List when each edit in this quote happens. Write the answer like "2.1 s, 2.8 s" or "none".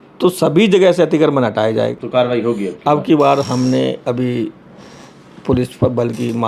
1.9 s